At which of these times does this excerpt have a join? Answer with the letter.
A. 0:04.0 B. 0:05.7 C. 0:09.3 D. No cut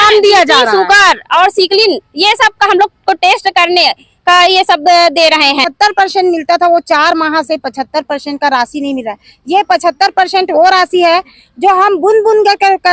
B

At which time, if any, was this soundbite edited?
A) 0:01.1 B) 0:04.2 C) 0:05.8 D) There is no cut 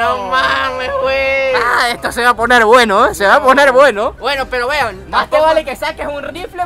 D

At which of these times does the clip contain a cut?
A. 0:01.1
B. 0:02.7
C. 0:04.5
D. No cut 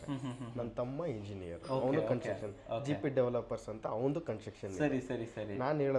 D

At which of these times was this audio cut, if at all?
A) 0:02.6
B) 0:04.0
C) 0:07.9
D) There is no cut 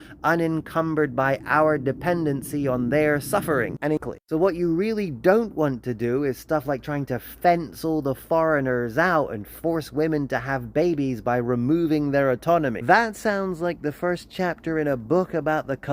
B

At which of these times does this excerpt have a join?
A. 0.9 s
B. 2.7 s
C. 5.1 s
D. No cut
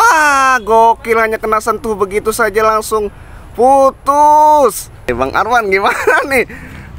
C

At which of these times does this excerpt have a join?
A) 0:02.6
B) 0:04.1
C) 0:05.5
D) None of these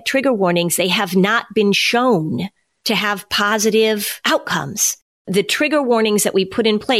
B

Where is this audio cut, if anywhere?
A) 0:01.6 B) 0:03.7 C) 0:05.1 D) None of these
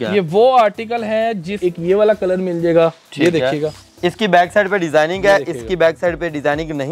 A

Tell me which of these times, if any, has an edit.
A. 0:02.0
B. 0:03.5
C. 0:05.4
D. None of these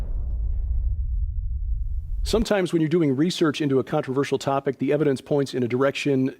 C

